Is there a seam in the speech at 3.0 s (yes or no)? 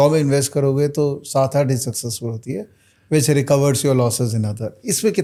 no